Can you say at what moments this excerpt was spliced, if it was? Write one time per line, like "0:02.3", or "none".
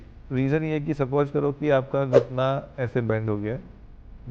none